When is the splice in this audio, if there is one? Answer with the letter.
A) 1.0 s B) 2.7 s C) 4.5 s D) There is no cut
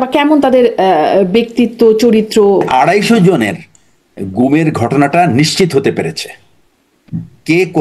B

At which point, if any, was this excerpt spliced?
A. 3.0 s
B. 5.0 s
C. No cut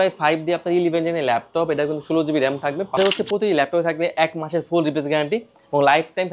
A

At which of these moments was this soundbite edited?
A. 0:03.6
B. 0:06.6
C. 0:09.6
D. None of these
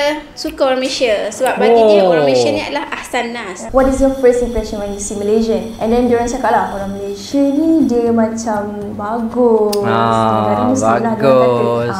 A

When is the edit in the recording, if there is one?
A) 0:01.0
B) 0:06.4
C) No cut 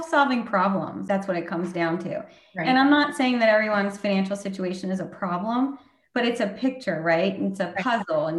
A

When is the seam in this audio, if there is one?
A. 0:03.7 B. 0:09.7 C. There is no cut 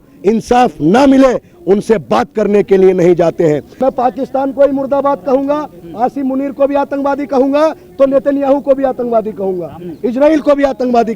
A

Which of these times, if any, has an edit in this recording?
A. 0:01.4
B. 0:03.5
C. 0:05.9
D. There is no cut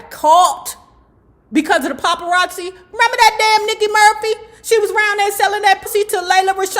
C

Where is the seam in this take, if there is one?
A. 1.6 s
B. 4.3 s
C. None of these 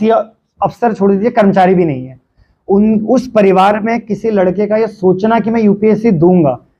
C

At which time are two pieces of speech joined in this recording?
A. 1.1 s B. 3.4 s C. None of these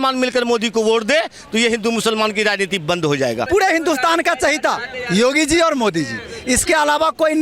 B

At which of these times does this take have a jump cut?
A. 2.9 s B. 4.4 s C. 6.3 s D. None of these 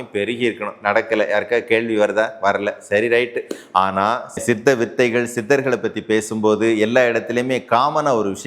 B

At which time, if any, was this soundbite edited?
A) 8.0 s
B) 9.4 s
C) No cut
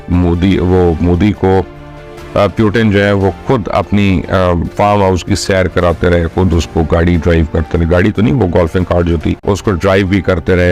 B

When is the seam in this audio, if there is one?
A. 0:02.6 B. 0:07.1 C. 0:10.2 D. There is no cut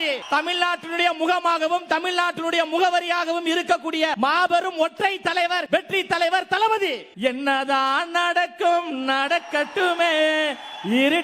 B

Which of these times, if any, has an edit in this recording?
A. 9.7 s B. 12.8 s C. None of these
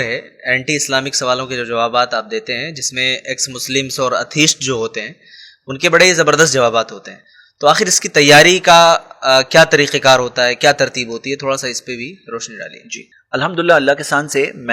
C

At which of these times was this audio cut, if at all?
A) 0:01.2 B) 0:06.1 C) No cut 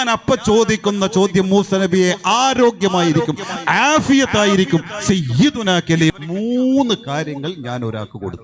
B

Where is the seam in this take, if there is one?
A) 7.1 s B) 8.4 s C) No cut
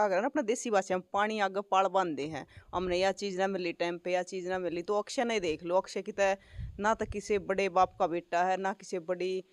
C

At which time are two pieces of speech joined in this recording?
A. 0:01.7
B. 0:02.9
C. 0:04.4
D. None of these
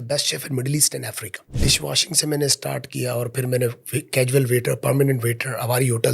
A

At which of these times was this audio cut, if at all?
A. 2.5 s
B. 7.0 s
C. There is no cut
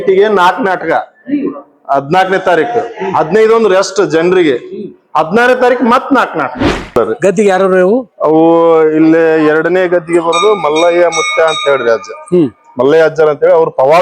B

